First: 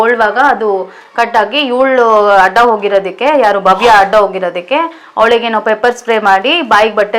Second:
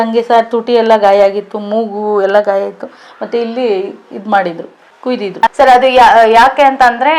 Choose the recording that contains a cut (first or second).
second